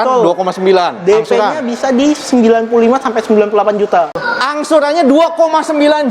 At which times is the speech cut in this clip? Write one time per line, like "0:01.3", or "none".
0:04.3